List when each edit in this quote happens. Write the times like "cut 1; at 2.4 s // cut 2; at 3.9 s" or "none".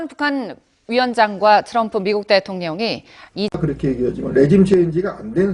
cut 1; at 3.6 s